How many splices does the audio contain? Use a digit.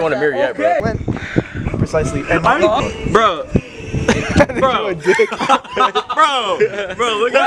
0